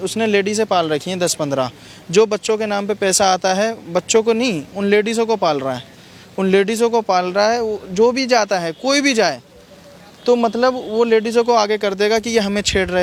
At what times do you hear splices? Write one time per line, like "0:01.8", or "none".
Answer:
none